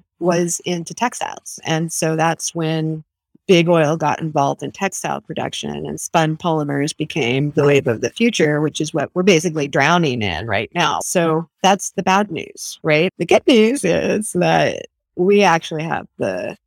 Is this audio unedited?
no; 2 cuts; at 11.0 s, 13.1 s

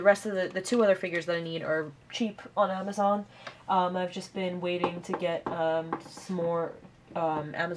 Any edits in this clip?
yes; 1 cut; at 4.2 s

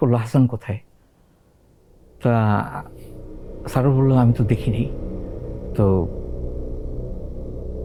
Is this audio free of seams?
yes; 0 cuts

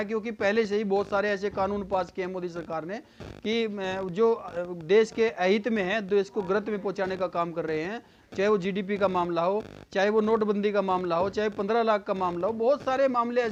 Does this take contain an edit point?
no; 0 cuts

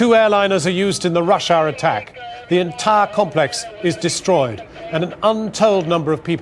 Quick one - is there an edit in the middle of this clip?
no; 0 cuts

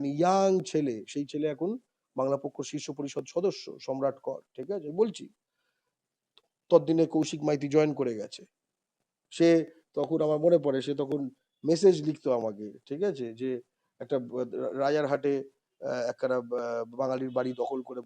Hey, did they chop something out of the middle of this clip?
no; 0 cuts

